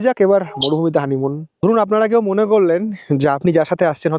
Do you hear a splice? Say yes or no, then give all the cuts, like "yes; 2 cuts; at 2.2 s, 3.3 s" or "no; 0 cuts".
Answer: no; 0 cuts